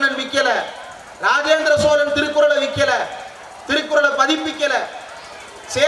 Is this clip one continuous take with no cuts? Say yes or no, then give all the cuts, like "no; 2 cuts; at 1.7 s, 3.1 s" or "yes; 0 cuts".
yes; 0 cuts